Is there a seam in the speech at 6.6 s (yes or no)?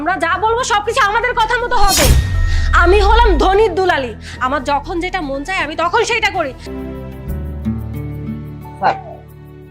yes